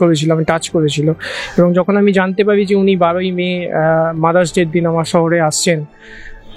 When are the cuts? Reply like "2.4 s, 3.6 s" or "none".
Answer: none